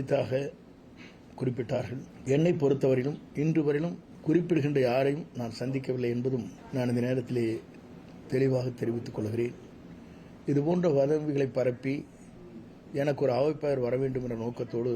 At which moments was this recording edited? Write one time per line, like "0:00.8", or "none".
0:02.1
0:04.1
0:06.6